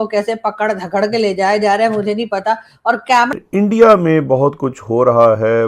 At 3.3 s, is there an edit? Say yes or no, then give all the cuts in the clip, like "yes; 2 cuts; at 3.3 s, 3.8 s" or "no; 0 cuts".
yes; 1 cut; at 3.3 s